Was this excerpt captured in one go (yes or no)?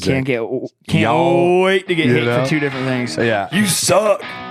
yes